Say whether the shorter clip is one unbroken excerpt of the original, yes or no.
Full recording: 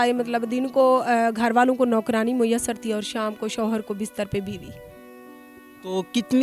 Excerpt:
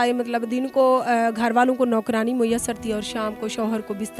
yes